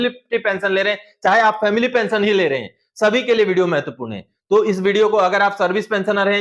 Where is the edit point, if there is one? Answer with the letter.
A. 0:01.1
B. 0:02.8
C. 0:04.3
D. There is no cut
D